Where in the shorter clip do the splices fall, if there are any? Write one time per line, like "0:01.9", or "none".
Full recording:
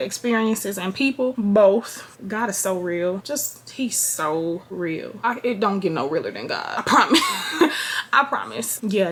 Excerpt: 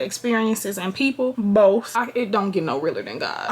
0:01.9